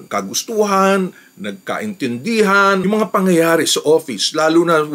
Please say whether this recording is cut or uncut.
cut